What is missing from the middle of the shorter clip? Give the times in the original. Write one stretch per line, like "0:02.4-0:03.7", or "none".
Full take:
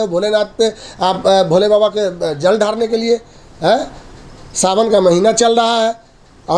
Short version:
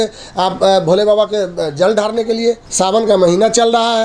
0:03.3-0:04.5